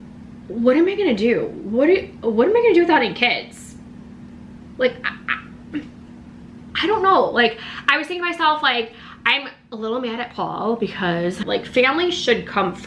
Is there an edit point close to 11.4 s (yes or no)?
yes